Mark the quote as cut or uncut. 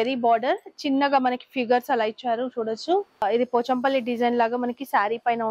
cut